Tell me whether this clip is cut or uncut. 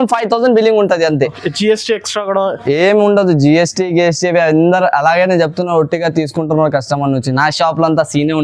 uncut